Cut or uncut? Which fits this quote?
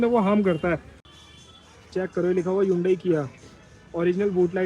cut